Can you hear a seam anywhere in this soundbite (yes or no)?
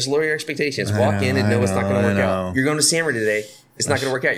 no